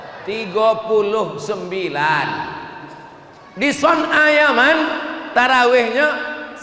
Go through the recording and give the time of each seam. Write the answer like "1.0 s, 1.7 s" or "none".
none